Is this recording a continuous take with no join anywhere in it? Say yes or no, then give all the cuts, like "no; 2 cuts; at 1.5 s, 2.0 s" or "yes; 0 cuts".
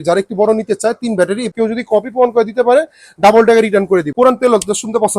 no; 2 cuts; at 1.5 s, 4.1 s